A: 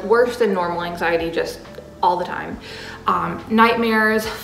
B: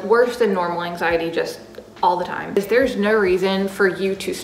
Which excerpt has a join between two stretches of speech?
B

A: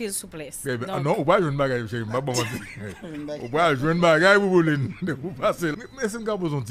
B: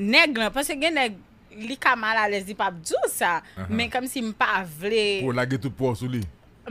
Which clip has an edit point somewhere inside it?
A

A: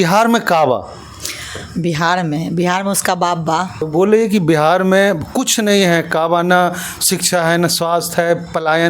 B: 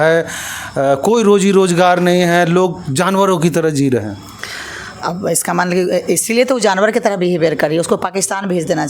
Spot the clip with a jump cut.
A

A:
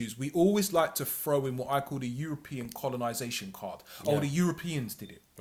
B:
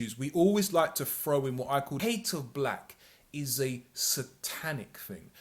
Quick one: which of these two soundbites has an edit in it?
B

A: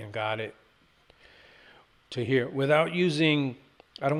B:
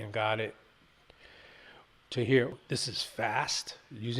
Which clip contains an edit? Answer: B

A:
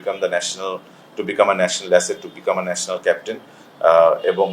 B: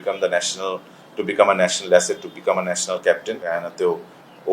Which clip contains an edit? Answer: B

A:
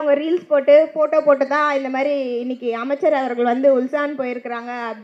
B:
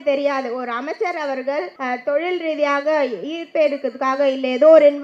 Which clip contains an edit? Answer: B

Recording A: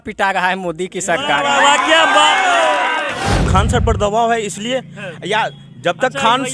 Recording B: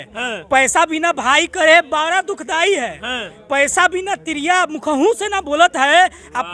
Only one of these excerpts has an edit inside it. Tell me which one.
A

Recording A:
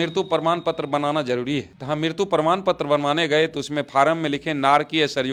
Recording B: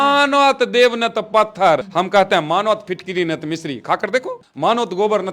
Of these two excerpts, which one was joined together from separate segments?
B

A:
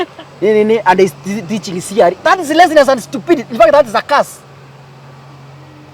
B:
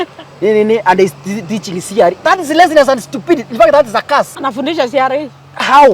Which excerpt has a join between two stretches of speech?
B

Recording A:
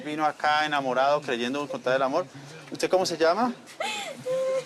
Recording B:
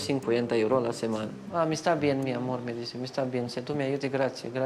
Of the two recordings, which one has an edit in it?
B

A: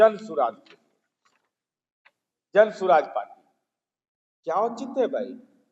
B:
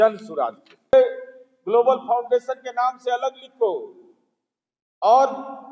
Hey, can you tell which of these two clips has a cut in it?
B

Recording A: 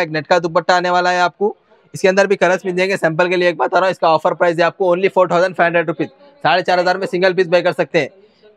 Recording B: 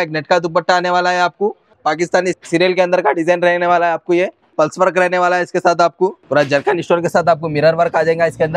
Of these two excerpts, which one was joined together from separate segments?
B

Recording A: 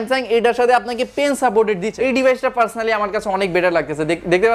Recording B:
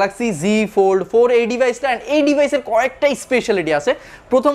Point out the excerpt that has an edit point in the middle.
A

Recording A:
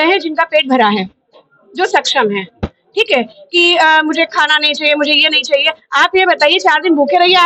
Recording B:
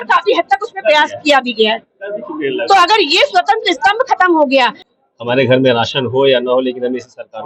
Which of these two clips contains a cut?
B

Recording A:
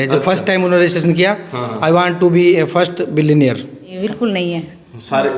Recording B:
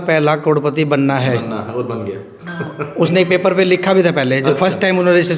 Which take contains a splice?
A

